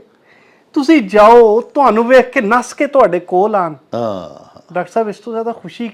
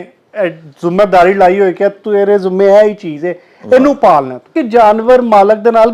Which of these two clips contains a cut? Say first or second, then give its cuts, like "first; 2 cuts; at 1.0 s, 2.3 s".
second; 1 cut; at 4.5 s